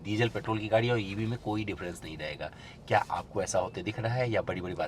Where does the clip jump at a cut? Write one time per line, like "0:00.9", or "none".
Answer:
none